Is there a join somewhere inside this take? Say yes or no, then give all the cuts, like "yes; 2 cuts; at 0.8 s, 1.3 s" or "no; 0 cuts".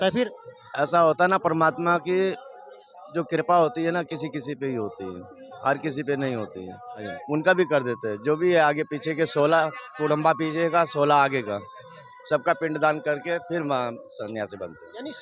yes; 1 cut; at 7.1 s